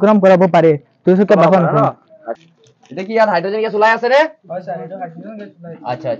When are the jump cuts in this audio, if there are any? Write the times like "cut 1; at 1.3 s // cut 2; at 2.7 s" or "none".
cut 1; at 2.1 s

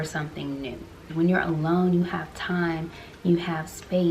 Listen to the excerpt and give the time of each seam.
cut 1; at 1.0 s

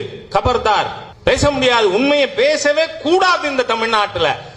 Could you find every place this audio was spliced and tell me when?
cut 1; at 1.0 s

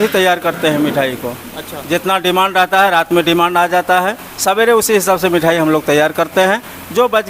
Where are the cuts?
none

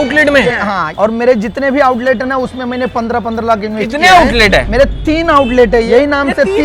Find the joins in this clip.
cut 1; at 0.9 s

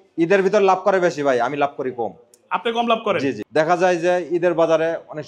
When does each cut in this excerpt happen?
cut 1; at 3.4 s

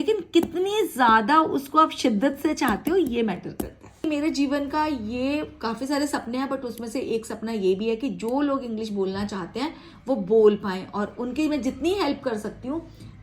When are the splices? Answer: cut 1; at 4.1 s

